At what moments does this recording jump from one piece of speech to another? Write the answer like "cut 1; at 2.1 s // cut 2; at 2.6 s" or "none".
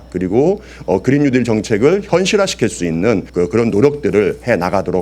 cut 1; at 3.3 s